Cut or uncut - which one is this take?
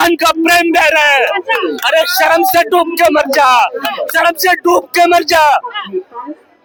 uncut